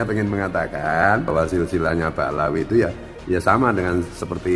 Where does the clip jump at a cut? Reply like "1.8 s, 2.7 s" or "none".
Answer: 1.3 s